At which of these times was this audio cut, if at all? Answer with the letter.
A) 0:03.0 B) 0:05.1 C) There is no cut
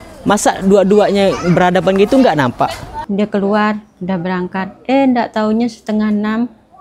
A